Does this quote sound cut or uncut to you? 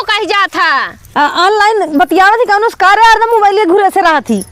cut